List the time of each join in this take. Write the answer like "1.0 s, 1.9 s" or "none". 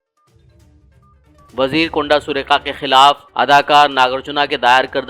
1.4 s